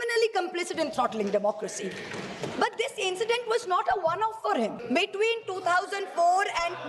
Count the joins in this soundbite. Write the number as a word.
one